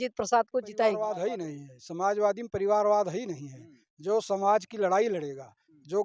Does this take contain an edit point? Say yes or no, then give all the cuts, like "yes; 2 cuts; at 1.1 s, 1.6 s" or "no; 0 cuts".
yes; 1 cut; at 1.1 s